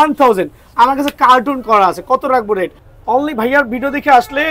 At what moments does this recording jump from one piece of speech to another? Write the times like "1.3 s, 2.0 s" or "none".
2.8 s